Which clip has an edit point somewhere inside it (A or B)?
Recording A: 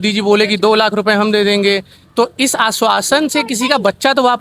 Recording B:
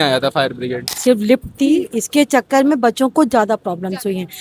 B